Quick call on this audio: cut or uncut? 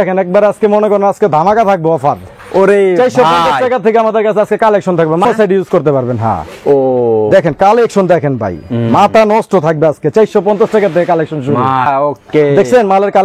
cut